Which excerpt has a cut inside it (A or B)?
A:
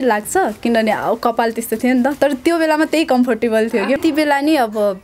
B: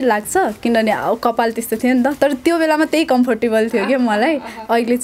A